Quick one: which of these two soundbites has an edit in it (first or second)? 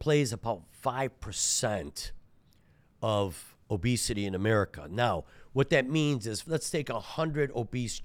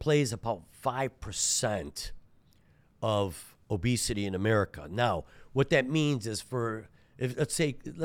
first